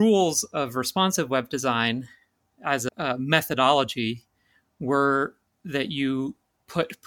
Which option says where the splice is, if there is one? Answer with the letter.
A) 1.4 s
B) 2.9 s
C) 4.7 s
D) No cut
B